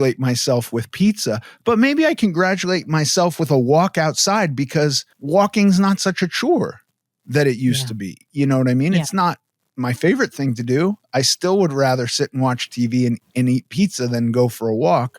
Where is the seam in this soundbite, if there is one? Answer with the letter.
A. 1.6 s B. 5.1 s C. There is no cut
B